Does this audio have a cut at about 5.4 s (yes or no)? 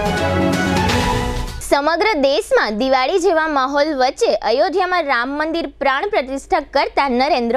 no